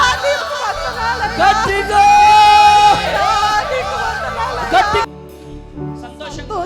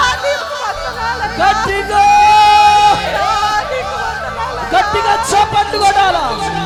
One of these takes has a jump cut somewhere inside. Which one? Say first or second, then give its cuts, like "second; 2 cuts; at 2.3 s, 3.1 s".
first; 1 cut; at 5.0 s